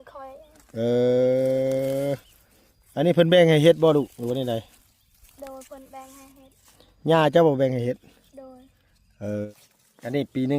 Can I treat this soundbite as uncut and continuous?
no; 1 cut; at 9.5 s

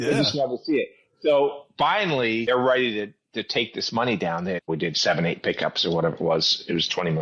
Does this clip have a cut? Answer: yes; 2 cuts; at 2.4 s, 4.7 s

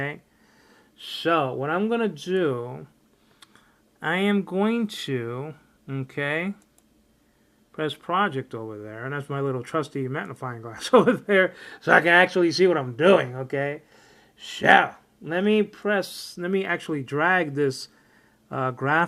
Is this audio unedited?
yes; 0 cuts

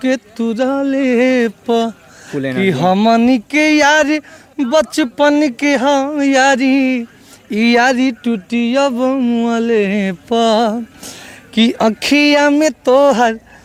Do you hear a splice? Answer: no; 0 cuts

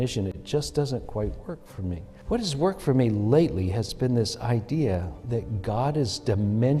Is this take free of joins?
no; 1 cut; at 2.1 s

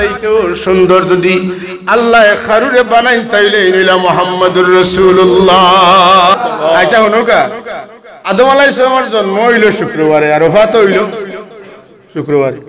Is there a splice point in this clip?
yes; 1 cut; at 6.3 s

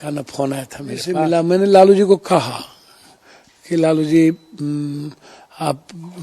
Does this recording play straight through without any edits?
no; 1 cut; at 1.2 s

